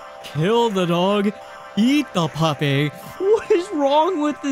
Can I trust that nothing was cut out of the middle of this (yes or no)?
no